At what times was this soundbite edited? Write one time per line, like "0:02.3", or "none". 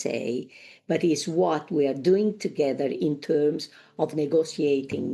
0:01.7